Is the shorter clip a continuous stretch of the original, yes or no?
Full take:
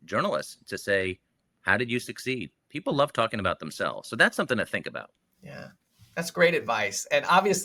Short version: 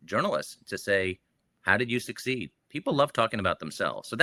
yes